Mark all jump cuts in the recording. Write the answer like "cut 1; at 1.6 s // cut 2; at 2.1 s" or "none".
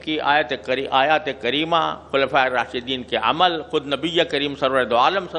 none